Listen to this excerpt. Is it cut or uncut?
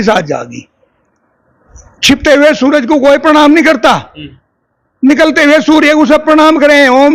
uncut